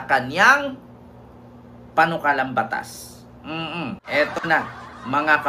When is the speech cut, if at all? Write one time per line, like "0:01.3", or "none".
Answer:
0:04.0